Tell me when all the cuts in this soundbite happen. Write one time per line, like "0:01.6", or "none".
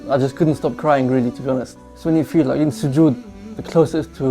0:01.8